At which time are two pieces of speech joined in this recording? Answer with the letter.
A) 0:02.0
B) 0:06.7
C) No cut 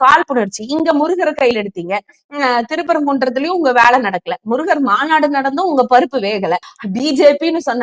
B